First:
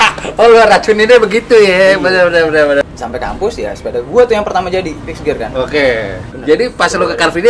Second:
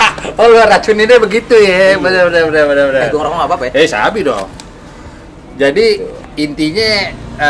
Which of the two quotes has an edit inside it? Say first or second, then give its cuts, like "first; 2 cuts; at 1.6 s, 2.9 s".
first; 2 cuts; at 2.8 s, 6.3 s